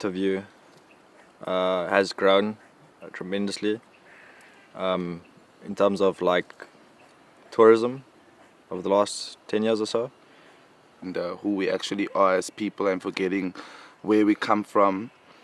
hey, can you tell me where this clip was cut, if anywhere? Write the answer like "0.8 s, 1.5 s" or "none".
none